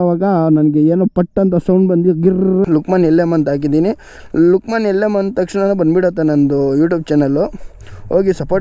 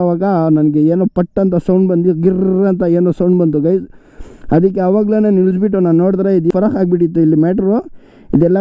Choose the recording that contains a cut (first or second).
first